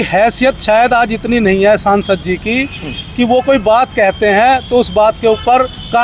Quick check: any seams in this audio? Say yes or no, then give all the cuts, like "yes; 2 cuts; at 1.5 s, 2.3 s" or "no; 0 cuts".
no; 0 cuts